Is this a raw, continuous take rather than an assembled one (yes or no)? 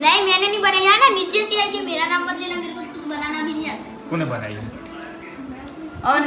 yes